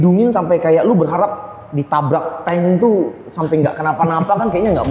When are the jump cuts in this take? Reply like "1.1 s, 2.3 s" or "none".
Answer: none